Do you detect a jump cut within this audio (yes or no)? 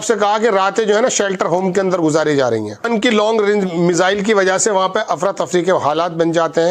no